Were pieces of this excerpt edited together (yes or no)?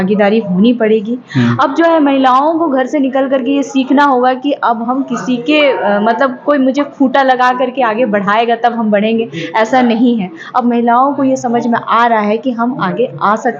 no